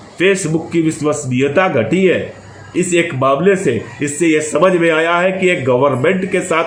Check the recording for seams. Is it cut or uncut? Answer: uncut